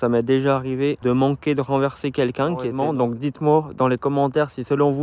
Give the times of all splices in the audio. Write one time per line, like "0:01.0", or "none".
0:01.0
0:02.8